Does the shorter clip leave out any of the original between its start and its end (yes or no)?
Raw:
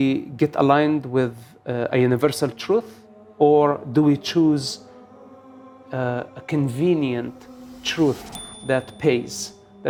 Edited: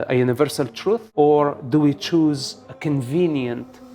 yes